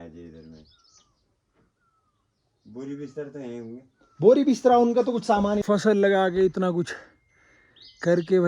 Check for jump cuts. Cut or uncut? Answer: cut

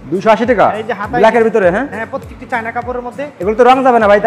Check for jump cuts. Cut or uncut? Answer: uncut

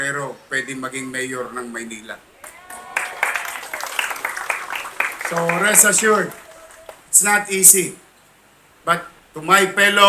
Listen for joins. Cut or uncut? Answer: uncut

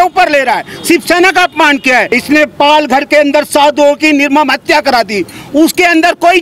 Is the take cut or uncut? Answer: cut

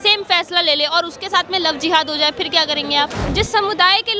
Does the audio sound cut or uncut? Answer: cut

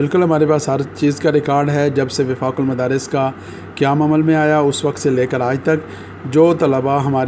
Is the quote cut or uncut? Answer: uncut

